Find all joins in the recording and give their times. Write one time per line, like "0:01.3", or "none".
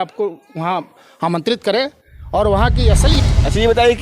0:03.1